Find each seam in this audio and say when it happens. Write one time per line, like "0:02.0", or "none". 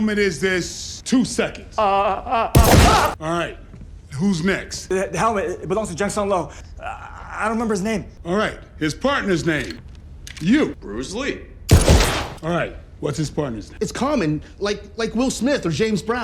0:06.5
0:13.7